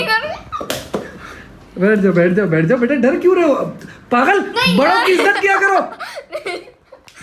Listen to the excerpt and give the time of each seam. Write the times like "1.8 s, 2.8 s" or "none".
none